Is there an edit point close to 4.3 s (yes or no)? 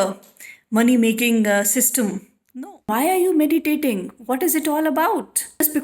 no